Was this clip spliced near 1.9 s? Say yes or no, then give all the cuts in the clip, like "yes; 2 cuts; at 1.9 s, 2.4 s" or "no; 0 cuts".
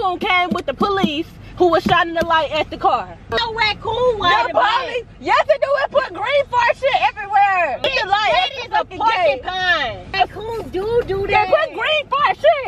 no; 3 cuts; at 3.3 s, 7.8 s, 10.1 s